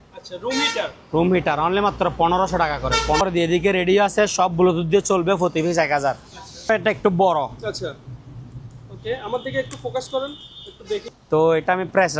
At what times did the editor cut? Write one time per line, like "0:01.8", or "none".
0:03.2
0:06.7
0:11.1